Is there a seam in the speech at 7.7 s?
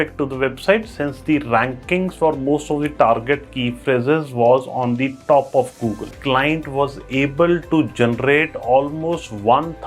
no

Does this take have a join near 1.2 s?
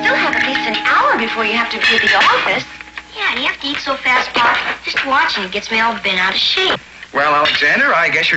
yes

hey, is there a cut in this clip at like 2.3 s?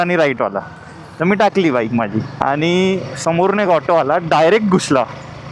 yes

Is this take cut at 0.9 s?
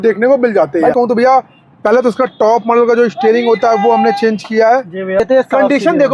yes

